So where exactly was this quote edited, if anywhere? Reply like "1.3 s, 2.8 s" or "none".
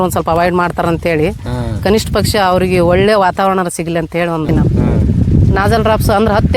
4.5 s